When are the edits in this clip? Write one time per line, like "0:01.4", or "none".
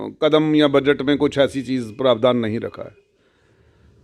none

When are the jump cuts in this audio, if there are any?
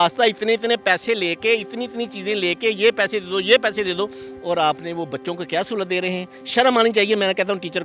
none

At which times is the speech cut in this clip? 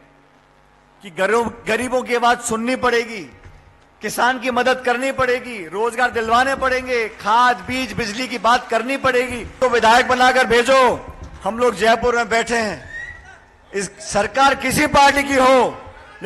0:09.6

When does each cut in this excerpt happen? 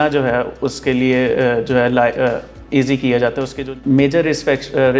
0:03.7

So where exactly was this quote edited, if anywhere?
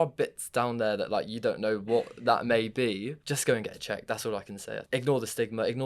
0:03.2
0:04.8

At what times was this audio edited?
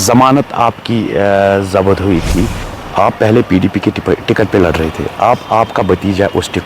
0:02.8

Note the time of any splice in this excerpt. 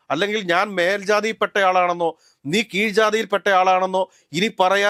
none

